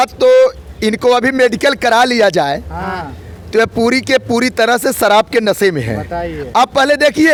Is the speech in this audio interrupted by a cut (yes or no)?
no